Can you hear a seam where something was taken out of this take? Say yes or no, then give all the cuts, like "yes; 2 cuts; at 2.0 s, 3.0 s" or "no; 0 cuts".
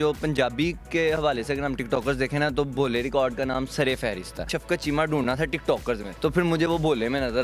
yes; 2 cuts; at 4.6 s, 6.1 s